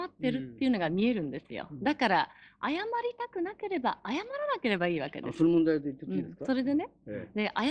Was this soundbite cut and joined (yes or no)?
no